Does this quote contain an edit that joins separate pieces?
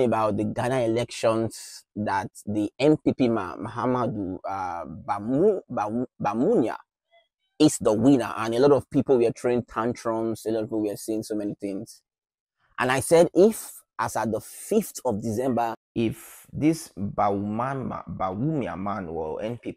yes; 1 cut; at 15.8 s

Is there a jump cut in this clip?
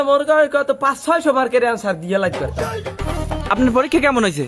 yes; 1 cut; at 3.0 s

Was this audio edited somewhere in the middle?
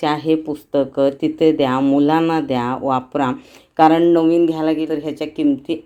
no; 0 cuts

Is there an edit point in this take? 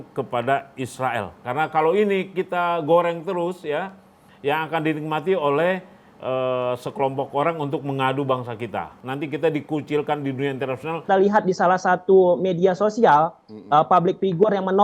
yes; 3 cuts; at 1.4 s, 9.0 s, 11.0 s

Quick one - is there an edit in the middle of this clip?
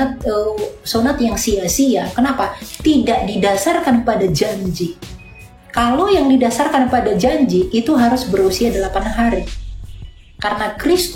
no; 0 cuts

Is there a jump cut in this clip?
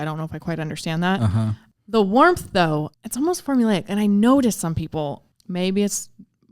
yes; 3 cuts; at 1.7 s, 3.0 s, 5.3 s

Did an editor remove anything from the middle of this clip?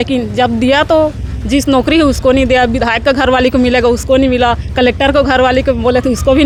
no; 0 cuts

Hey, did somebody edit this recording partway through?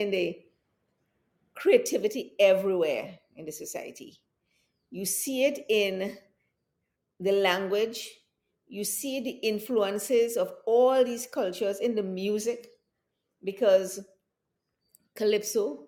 no; 0 cuts

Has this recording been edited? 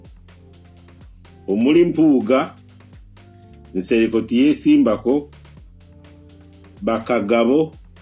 yes; 1 cut; at 1.5 s

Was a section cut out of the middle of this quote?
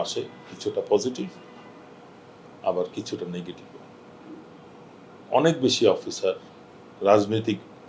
no; 0 cuts

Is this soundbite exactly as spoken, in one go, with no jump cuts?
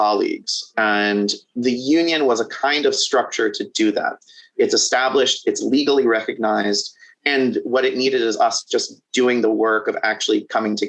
yes; 0 cuts

